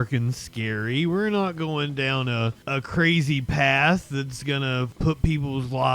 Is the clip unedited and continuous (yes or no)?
no